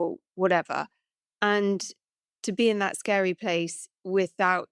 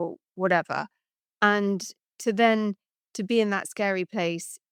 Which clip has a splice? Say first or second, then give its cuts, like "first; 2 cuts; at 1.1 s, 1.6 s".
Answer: first; 1 cut; at 2.1 s